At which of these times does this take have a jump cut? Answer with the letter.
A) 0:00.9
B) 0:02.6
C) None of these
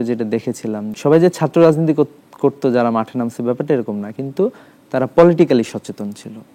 A